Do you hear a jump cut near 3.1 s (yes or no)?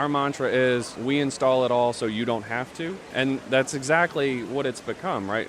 yes